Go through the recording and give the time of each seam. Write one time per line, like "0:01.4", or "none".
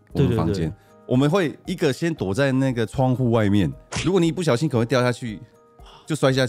0:03.8